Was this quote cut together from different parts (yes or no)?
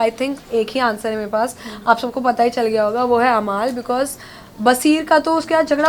no